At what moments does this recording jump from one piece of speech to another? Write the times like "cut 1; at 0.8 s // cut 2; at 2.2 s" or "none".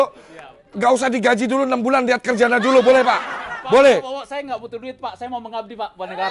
none